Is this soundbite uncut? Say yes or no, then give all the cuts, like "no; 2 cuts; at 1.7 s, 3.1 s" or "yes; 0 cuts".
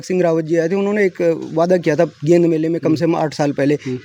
yes; 0 cuts